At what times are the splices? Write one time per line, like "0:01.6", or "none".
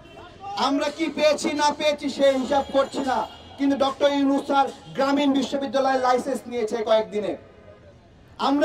0:07.5